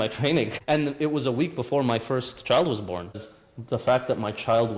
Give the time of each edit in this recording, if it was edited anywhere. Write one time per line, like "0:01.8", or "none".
0:03.2